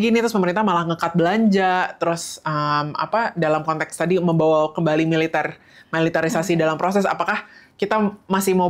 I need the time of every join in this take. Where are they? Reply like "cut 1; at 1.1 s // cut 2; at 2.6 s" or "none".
none